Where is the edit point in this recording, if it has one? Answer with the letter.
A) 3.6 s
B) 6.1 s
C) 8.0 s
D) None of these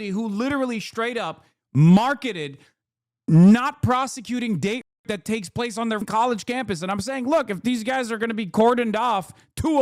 B